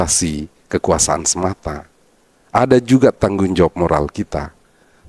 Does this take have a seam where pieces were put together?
no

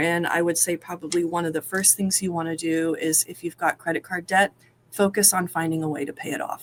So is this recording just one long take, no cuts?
yes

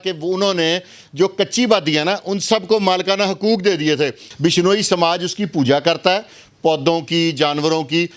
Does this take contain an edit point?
yes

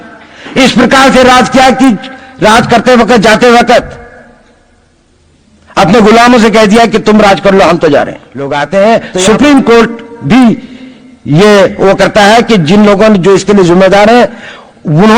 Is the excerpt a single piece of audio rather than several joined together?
no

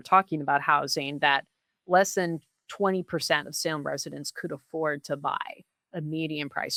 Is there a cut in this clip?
no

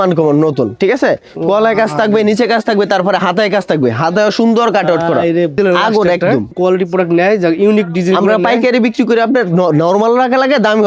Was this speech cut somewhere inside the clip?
yes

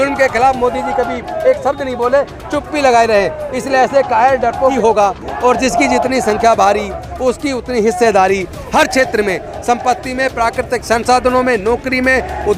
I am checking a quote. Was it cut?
yes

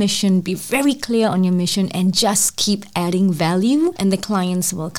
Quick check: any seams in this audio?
yes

